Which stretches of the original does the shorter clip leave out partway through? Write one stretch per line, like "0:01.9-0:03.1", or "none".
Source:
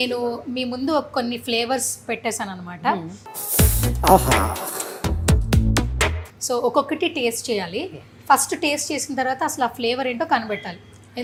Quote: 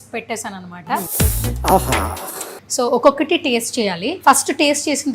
0:03.0-0:03.5
0:05.0-0:06.3
0:07.8-0:08.1